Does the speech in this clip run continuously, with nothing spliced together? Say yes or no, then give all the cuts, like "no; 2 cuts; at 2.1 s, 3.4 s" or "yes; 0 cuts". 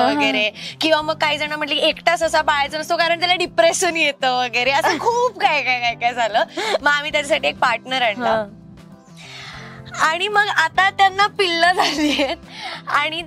yes; 0 cuts